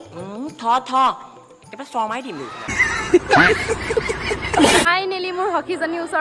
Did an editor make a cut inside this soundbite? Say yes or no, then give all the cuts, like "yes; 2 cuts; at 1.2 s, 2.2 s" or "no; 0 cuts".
yes; 1 cut; at 4.9 s